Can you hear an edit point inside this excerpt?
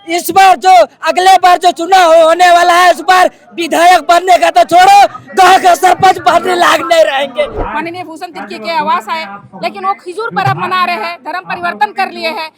yes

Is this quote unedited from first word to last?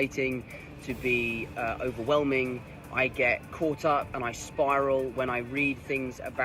yes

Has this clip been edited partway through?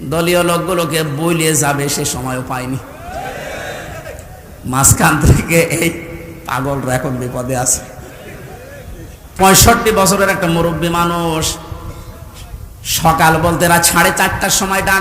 yes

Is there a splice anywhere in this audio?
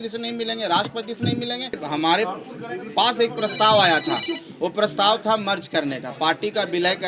yes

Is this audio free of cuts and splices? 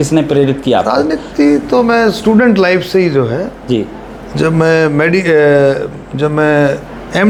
yes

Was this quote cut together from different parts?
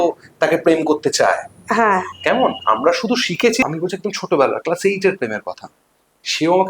yes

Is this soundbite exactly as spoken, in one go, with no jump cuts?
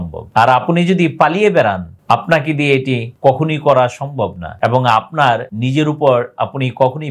yes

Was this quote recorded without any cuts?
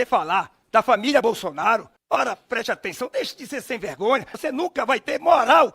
no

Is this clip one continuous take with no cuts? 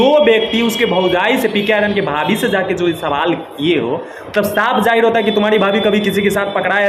yes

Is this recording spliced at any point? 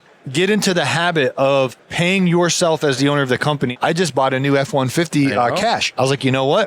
yes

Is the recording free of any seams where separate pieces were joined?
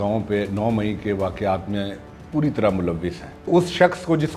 no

